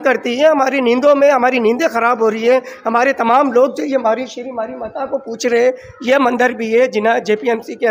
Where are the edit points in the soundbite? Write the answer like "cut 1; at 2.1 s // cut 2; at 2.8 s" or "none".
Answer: none